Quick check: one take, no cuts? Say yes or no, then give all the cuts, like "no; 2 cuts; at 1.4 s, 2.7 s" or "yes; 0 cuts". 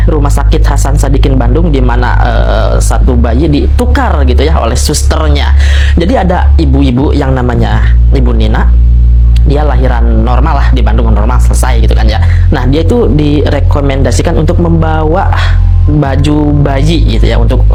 yes; 0 cuts